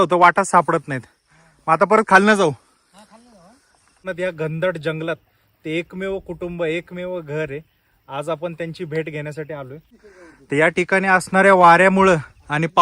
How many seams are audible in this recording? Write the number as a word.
two